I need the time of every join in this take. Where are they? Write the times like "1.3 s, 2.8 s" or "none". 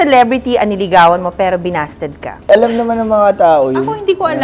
2.5 s